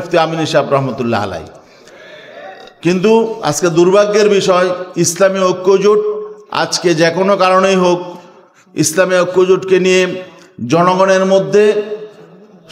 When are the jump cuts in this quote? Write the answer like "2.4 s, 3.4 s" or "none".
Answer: none